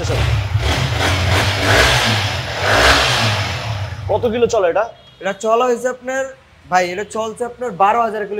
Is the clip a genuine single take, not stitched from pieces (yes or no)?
yes